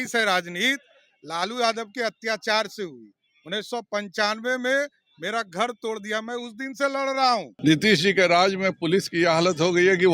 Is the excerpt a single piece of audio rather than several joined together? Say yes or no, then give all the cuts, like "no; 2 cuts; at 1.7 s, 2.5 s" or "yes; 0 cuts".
no; 1 cut; at 7.5 s